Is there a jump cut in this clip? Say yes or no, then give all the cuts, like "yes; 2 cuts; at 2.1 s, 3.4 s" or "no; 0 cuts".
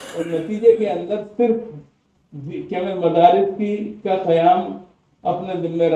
no; 0 cuts